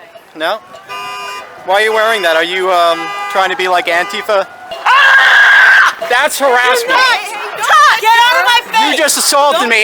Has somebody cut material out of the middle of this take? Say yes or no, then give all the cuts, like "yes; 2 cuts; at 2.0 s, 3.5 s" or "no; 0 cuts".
yes; 1 cut; at 4.6 s